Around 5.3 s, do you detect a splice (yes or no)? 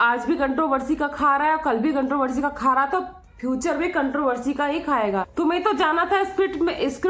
yes